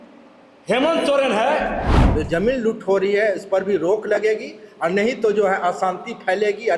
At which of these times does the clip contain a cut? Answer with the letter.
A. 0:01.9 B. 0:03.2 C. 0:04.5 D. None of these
A